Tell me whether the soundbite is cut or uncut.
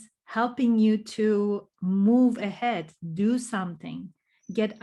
uncut